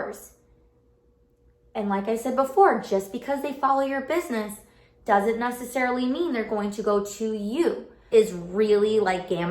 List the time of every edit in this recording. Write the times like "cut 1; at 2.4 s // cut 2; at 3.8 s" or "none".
cut 1; at 8.1 s

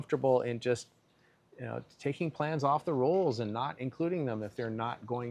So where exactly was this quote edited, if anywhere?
none

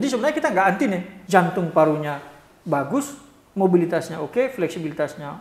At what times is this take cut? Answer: cut 1; at 1.1 s

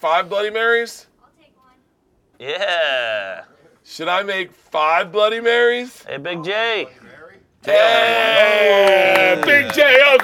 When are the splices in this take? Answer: none

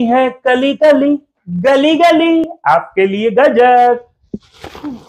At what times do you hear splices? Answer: none

